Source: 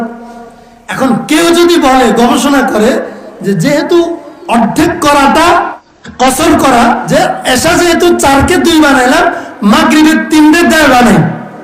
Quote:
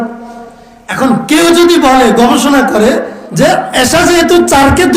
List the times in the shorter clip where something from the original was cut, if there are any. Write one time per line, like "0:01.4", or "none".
0:03.3